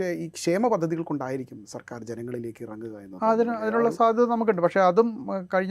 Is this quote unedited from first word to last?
yes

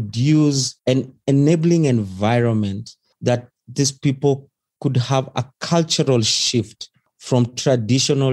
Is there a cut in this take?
no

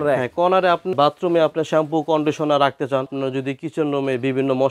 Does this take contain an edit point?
yes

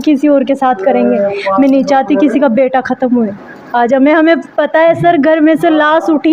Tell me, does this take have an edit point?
no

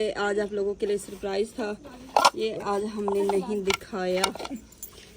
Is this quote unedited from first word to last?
yes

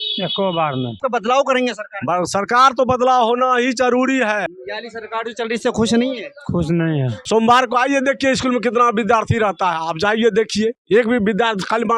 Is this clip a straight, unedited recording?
no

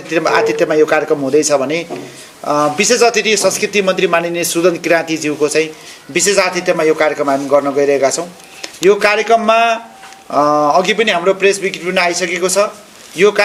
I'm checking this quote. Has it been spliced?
no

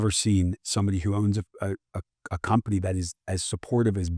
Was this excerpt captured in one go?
yes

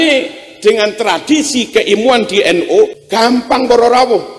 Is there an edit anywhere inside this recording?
yes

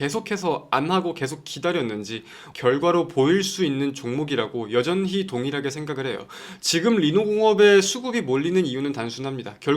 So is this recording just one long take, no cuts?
no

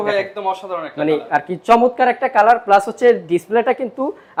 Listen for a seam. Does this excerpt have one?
no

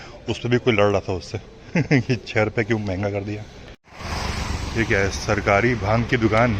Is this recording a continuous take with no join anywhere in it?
no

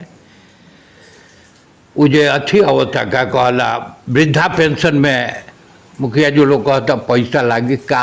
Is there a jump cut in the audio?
no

